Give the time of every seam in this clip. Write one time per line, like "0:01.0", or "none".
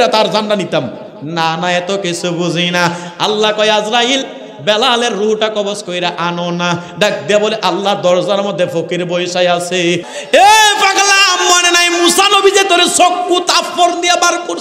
0:10.1